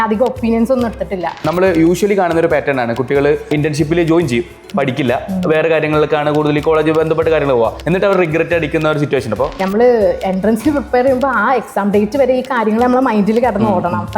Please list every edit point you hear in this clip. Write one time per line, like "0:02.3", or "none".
0:01.5
0:03.5
0:07.8
0:09.6